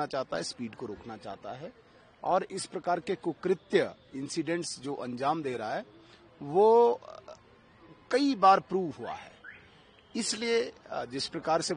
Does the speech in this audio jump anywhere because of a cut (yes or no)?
no